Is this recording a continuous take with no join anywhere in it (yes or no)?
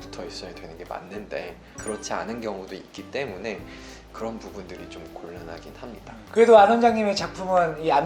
no